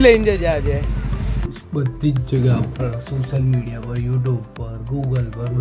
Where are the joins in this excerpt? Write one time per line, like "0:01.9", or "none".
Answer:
0:01.6

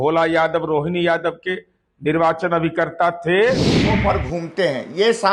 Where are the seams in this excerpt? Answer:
0:03.9

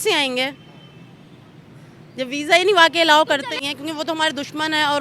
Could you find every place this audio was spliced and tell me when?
0:03.5

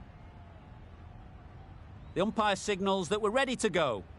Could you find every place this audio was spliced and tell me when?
0:02.1
0:03.3

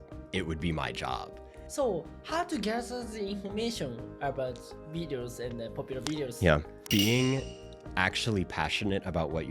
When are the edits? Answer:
0:01.7
0:06.7

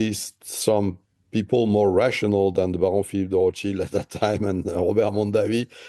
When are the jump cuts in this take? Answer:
none

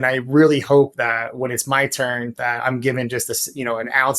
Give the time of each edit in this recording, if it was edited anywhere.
0:02.4

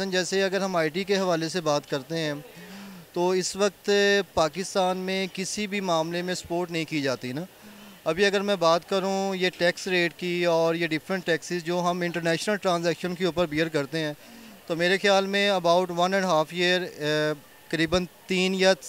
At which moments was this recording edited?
none

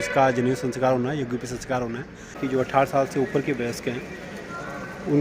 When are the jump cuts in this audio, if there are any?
0:02.3

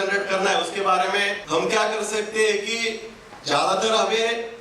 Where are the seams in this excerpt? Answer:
0:01.4

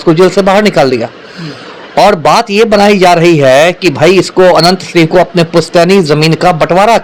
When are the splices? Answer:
none

